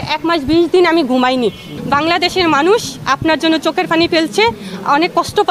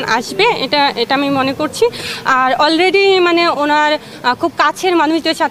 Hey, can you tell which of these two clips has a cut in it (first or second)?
first